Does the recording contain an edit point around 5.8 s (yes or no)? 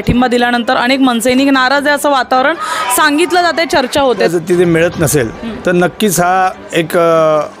no